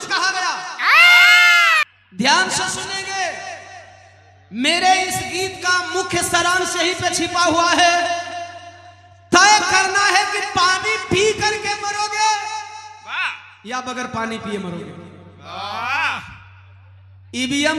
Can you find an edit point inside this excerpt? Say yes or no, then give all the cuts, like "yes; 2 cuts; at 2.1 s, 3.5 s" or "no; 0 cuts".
yes; 1 cut; at 1.8 s